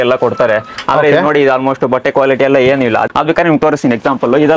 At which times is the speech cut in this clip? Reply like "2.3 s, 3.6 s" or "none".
3.0 s